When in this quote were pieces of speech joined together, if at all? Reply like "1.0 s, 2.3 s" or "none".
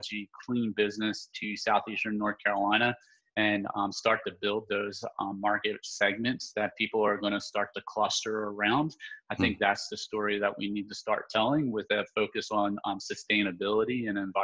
none